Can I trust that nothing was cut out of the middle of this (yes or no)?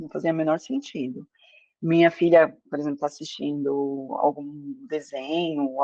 yes